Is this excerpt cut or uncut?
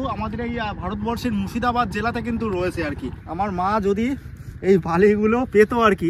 cut